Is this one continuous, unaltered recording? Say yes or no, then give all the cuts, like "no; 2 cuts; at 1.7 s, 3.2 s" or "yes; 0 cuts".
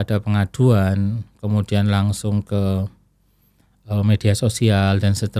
yes; 0 cuts